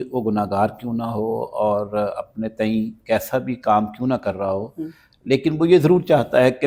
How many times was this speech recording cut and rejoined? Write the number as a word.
zero